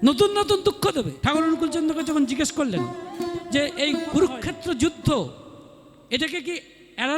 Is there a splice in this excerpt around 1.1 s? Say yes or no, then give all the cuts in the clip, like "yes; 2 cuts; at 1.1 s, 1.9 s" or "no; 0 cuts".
yes; 1 cut; at 1.1 s